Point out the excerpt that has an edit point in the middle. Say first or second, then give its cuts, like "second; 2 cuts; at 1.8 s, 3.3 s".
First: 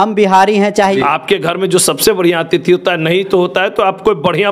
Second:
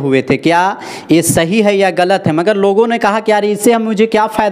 first; 1 cut; at 1.0 s